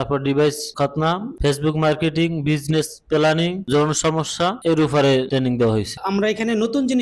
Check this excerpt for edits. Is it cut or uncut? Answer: cut